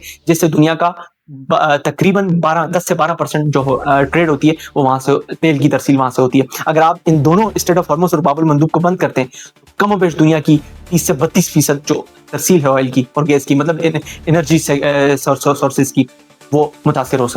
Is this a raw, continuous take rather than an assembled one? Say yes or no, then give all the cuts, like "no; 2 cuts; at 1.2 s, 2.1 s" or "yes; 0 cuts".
yes; 0 cuts